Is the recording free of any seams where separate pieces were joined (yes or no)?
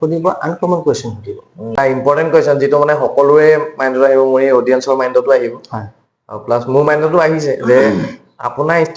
no